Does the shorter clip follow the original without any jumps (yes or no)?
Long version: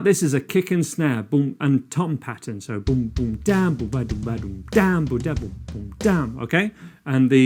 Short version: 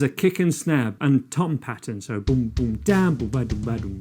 no